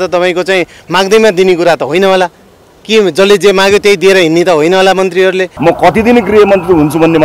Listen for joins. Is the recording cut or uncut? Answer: cut